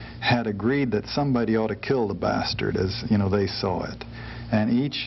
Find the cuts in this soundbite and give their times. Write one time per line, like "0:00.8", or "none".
none